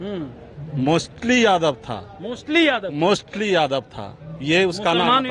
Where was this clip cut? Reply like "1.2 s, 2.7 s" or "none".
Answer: none